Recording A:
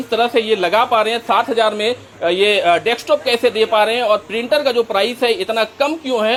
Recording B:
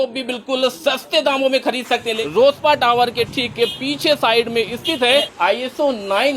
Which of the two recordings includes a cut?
B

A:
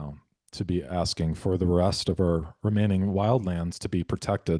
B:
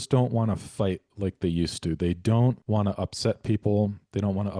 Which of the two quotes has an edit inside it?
B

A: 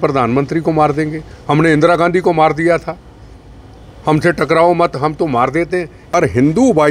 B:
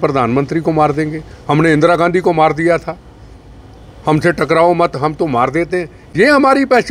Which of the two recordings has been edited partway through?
A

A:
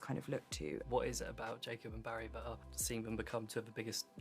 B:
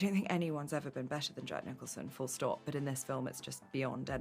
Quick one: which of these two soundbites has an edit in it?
A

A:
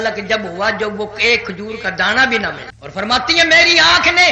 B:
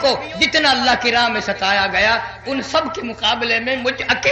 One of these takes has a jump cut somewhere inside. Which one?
A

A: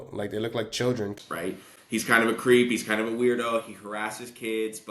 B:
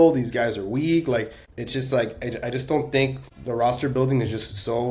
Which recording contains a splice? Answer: A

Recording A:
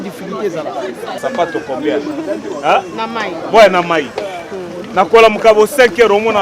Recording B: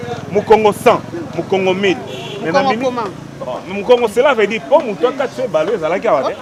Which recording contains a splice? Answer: A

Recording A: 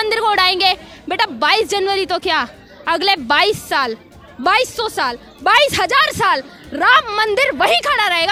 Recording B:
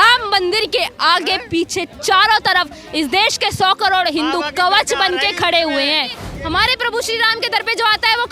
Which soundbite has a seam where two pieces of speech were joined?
B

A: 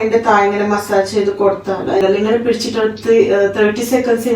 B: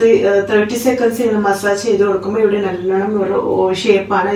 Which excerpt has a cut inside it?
A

